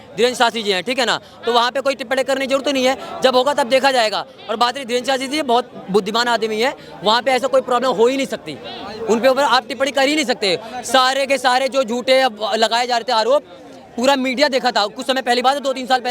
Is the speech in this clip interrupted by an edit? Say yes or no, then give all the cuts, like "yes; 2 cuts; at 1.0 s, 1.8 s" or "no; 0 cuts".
no; 0 cuts